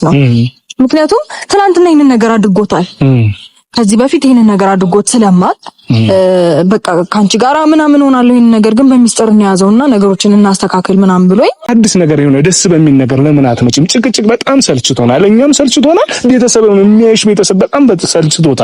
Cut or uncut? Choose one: cut